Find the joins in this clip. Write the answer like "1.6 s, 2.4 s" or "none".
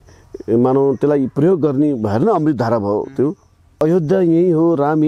3.8 s